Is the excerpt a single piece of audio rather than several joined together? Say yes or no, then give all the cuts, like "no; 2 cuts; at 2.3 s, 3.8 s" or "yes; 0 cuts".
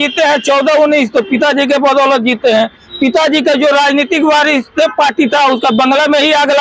yes; 0 cuts